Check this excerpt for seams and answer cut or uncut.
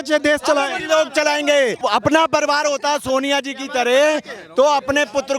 cut